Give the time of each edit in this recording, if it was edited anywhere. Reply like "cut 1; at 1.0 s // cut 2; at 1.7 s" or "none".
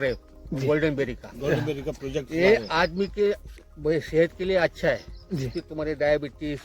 none